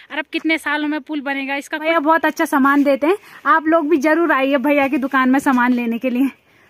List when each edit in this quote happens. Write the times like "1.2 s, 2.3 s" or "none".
1.9 s